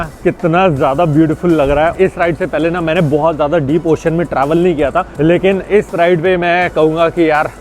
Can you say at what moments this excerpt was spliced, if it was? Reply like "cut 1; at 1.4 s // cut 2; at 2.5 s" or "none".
cut 1; at 1.9 s // cut 2; at 5.1 s